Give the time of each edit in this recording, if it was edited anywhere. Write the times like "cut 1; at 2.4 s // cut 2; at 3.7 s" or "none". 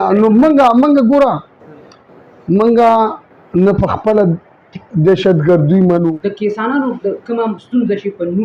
cut 1; at 6.1 s